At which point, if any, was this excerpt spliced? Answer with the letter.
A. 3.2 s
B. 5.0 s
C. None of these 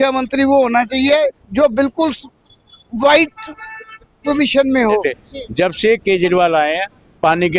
B